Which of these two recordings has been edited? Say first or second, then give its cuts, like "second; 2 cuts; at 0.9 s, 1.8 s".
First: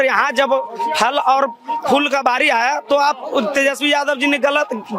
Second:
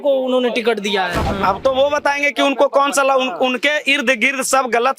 second; 1 cut; at 1.1 s